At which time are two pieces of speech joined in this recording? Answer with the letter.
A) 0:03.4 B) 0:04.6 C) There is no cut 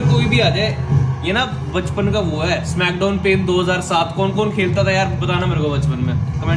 C